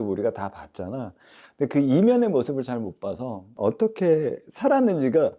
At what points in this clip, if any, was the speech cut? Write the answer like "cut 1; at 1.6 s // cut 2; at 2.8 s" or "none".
cut 1; at 3.4 s